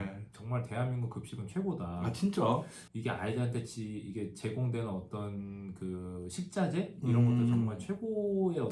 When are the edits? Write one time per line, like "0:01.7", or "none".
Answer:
0:02.8